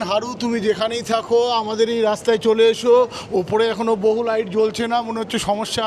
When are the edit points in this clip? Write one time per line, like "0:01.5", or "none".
none